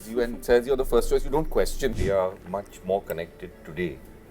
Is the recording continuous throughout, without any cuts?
no; 1 cut; at 1.9 s

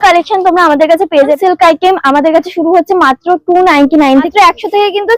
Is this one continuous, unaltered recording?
no; 2 cuts; at 1.4 s, 4.3 s

